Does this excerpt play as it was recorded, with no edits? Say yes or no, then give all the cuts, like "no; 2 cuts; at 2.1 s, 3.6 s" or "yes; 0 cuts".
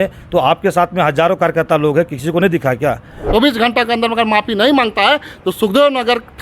no; 1 cut; at 3.2 s